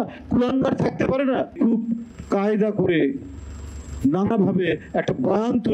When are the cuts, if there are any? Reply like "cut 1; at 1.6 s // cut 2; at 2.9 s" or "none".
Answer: cut 1; at 1.5 s